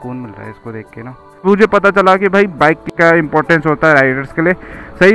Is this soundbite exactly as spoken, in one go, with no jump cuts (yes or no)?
no